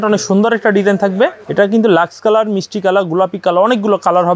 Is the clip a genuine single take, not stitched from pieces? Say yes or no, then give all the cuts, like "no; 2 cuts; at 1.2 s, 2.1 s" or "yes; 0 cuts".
no; 1 cut; at 1.4 s